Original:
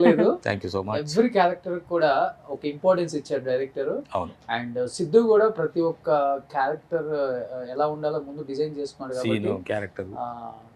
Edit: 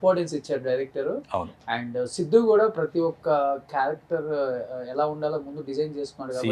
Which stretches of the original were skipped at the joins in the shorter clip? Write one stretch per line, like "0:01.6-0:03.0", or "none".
none

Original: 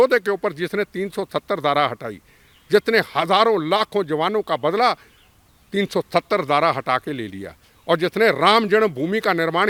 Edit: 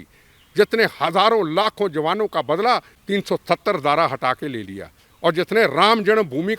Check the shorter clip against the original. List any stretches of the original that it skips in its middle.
0:05.1-0:05.6

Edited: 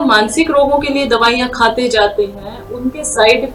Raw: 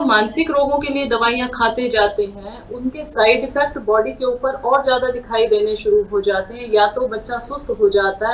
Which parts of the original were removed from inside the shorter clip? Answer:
none

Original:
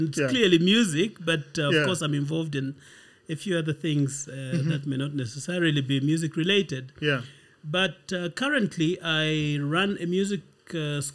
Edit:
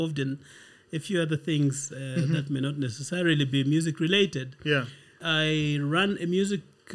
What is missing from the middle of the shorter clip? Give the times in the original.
0:07.6-0:09.0

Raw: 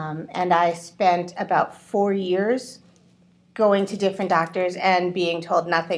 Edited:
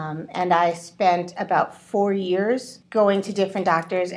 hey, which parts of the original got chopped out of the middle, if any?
0:02.8-0:03.4

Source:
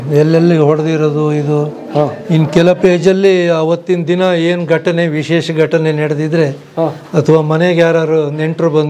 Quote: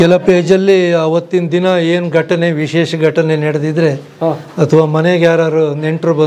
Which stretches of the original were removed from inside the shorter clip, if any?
none

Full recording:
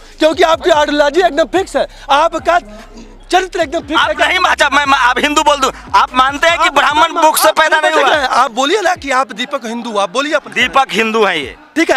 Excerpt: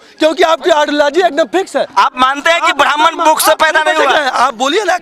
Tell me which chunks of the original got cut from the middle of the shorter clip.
0:01.9-0:05.9

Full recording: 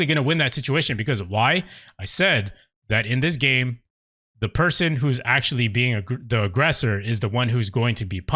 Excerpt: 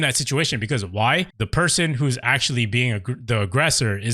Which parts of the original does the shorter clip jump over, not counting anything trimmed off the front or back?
0:01.8-0:04.4

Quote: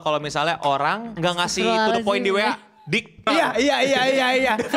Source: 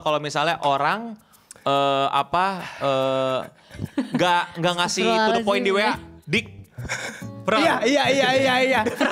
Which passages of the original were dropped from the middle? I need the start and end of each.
0:01.1-0:04.5
0:06.7-0:07.5

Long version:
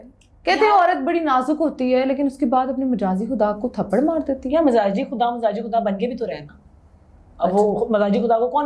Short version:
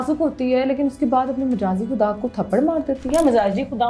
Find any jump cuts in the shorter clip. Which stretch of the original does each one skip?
none

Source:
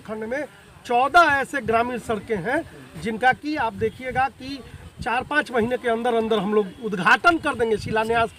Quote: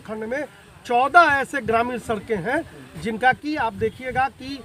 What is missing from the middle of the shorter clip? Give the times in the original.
none

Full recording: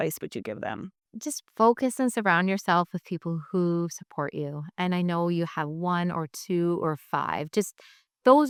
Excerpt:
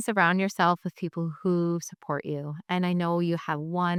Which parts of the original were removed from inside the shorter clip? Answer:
none

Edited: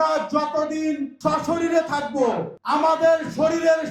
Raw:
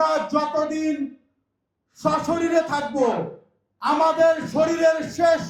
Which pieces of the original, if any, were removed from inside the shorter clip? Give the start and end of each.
0:01.1-0:01.9
0:03.6-0:03.9

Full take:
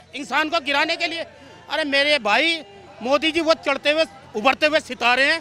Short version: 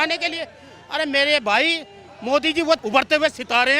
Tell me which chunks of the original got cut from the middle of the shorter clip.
0:03.6-0:04.3

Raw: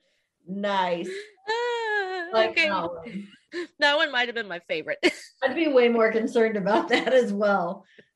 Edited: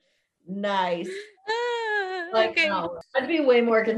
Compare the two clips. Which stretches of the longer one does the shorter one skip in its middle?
0:03.0-0:05.3

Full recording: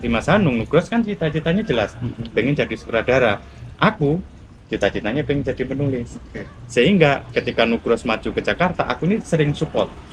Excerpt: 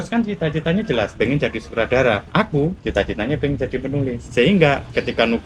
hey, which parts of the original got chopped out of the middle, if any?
0:01.9-0:02.3
0:03.6-0:04.3
0:06.1-0:06.6

